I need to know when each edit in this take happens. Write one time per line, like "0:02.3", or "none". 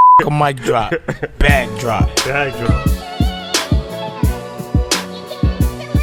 none